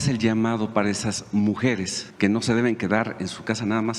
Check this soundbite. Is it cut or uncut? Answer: cut